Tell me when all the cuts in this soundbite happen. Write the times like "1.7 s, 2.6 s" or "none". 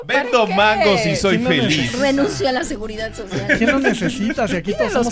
none